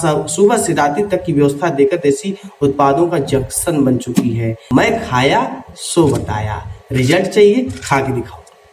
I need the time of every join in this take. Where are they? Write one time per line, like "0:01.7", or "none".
0:04.5

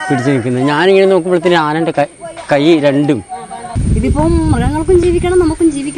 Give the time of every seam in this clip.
0:03.7

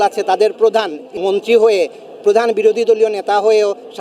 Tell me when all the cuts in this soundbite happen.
0:01.2

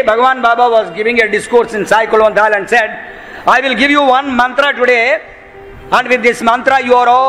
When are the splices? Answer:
none

